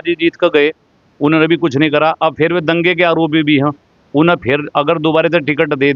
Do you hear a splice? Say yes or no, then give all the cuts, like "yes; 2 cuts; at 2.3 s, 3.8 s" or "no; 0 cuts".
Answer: no; 0 cuts